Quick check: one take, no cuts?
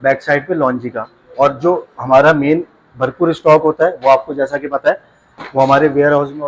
yes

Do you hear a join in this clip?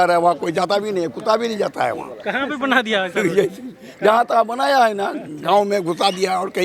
no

